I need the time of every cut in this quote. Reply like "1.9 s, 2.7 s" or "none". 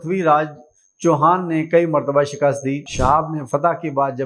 2.9 s